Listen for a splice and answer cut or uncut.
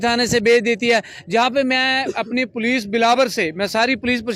uncut